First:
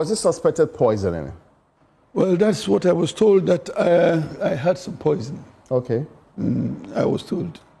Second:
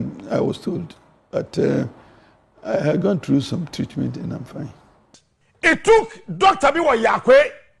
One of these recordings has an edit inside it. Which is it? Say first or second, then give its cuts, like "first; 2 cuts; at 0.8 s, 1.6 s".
second; 1 cut; at 5.0 s